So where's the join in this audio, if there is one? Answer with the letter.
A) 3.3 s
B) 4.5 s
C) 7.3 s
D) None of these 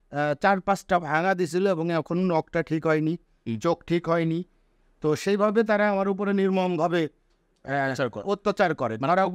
D